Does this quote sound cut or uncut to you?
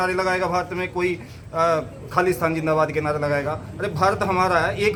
uncut